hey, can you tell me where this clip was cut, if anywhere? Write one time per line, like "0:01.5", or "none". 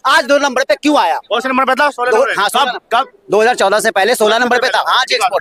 none